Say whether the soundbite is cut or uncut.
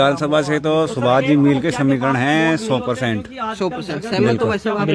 uncut